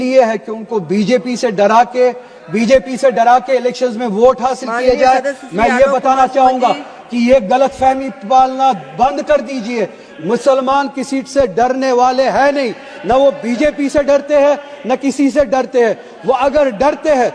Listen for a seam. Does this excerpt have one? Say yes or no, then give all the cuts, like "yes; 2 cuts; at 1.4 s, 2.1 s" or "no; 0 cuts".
no; 0 cuts